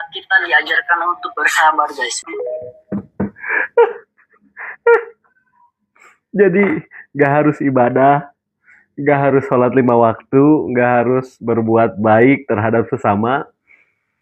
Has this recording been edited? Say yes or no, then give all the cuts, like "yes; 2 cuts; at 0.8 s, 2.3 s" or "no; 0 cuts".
yes; 1 cut; at 2.2 s